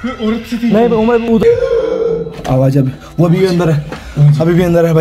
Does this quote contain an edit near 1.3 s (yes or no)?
yes